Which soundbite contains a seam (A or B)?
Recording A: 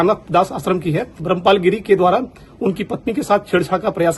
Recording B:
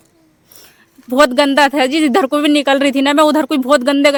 A